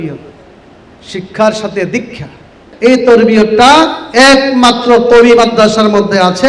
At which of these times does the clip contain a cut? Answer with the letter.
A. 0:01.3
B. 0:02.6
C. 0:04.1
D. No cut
B